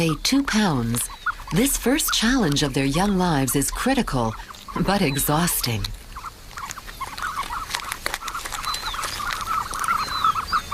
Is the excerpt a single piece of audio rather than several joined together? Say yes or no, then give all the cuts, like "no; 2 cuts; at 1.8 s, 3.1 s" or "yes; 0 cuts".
no; 1 cut; at 6.0 s